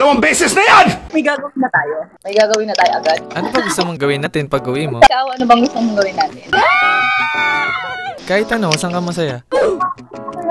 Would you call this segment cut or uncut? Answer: cut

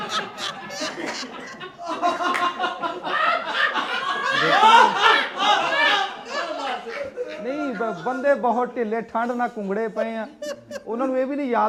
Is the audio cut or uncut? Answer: uncut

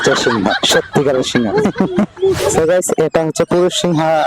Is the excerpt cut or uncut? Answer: cut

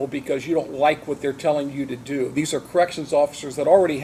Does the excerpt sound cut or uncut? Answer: uncut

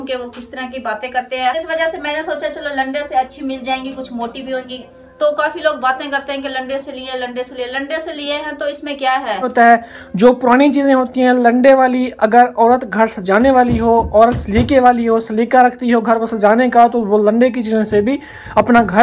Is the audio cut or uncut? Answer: cut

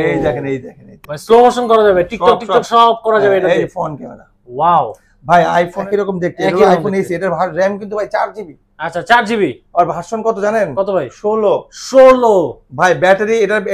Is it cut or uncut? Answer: cut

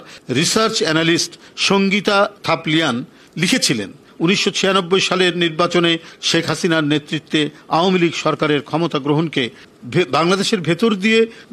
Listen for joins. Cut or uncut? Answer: cut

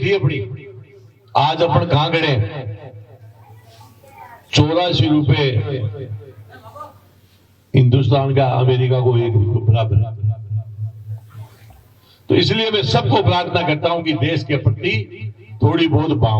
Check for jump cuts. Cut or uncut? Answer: uncut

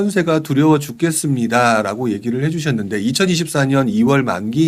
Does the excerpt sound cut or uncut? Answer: uncut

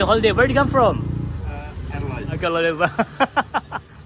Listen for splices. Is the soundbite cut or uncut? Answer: cut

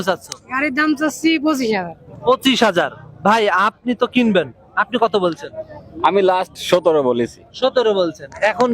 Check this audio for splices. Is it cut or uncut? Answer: uncut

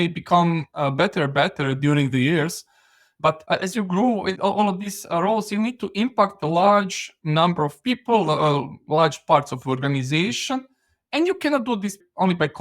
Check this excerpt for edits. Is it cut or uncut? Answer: cut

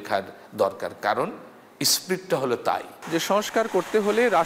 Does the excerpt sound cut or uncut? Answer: cut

